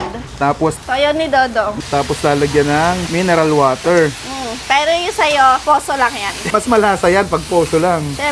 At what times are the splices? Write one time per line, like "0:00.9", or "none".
0:00.8
0:01.7
0:03.1
0:06.4